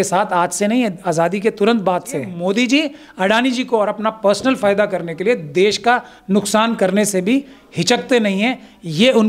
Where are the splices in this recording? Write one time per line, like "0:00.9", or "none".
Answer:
0:02.3